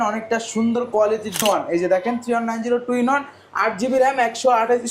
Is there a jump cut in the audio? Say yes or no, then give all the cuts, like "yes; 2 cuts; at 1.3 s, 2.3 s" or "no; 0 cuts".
yes; 1 cut; at 1.4 s